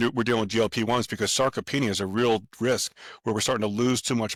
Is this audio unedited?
yes; 0 cuts

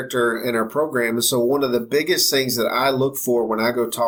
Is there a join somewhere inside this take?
no; 0 cuts

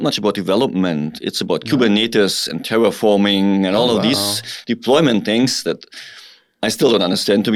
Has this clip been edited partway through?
no; 0 cuts

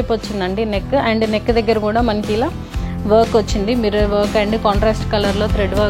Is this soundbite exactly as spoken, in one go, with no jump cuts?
yes; 0 cuts

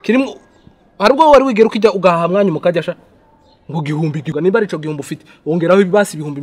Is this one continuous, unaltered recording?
no; 1 cut; at 4.3 s

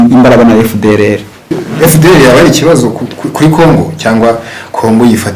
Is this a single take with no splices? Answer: no; 1 cut; at 1.6 s

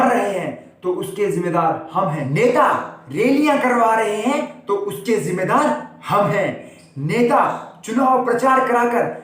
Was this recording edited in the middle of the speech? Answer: yes; 1 cut; at 2.3 s

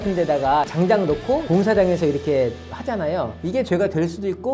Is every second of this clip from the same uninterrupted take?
no; 1 cut; at 3.4 s

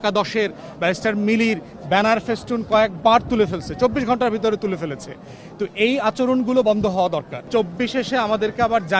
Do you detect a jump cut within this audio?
yes; 1 cut; at 7.4 s

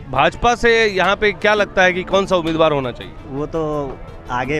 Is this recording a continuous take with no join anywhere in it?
no; 1 cut; at 3.1 s

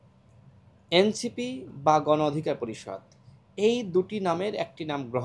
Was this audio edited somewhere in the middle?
no; 0 cuts

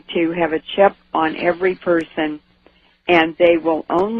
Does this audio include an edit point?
no; 0 cuts

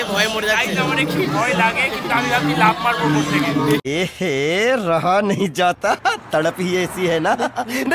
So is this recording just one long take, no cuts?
yes; 0 cuts

